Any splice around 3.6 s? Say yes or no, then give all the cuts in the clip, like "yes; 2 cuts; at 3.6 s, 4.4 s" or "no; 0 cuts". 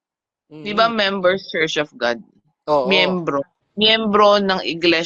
yes; 1 cut; at 3.6 s